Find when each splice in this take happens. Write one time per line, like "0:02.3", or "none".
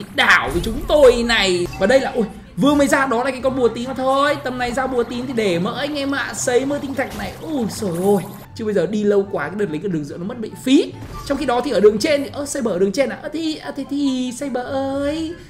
0:01.7
0:08.4